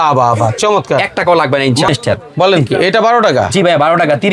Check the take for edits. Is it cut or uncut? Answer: cut